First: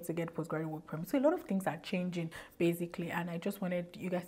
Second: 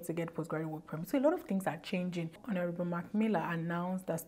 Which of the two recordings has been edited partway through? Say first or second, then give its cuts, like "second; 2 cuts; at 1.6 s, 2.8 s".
second; 1 cut; at 2.4 s